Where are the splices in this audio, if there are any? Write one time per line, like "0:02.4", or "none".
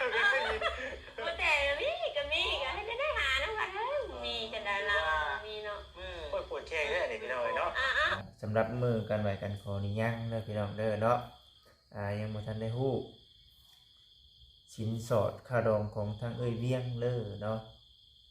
0:08.1